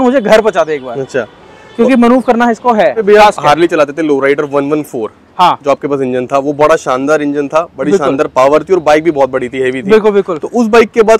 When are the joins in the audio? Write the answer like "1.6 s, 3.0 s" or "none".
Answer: 3.0 s